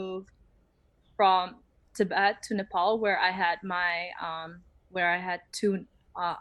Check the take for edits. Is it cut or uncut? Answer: uncut